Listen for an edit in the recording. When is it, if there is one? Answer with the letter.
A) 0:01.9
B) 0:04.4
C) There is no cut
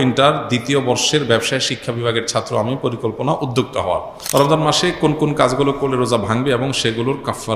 B